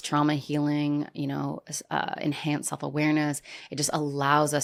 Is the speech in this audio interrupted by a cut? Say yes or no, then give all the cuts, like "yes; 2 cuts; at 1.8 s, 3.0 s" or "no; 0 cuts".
no; 0 cuts